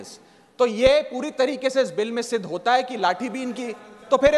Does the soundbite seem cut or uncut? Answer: uncut